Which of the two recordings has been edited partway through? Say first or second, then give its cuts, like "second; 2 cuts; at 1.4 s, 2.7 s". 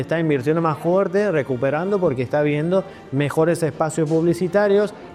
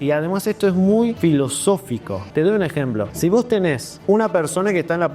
second; 4 cuts; at 1.2 s, 2.2 s, 3.1 s, 3.9 s